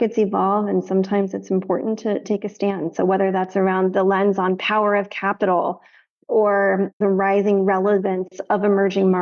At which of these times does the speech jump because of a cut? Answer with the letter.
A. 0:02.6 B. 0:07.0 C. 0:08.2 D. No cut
B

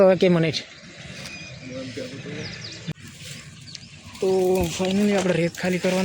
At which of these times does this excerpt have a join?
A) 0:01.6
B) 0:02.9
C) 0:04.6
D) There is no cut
B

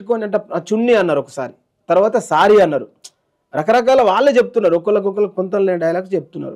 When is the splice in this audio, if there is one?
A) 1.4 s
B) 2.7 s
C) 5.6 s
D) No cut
D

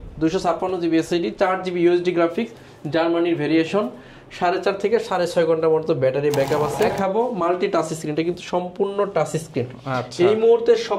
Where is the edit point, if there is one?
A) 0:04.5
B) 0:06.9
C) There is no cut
B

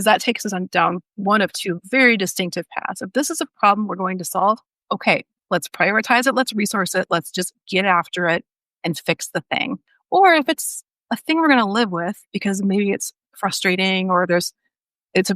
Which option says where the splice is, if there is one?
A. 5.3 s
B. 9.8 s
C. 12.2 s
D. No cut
B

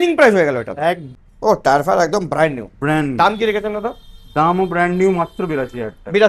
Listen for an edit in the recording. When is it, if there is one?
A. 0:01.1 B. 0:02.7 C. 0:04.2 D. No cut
A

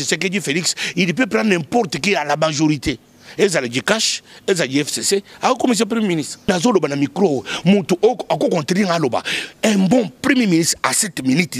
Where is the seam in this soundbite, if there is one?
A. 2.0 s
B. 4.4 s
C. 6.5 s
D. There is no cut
C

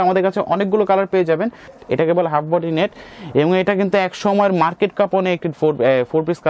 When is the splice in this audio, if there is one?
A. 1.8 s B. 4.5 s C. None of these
A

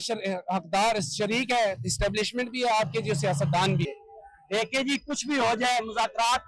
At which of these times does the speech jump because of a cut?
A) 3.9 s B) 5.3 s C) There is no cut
A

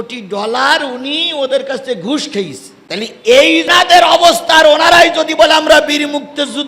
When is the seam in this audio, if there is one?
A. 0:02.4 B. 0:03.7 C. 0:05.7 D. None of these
B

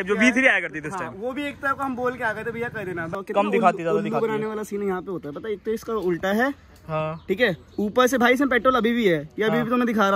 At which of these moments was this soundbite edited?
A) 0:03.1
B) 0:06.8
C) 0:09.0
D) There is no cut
A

